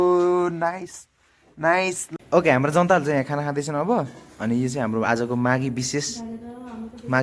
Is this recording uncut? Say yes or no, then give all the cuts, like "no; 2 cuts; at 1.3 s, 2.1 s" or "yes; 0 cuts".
no; 1 cut; at 2.2 s